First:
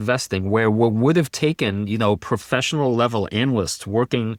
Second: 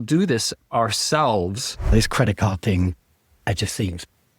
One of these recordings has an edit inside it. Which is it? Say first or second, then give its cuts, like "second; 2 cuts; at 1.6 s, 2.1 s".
second; 1 cut; at 1.9 s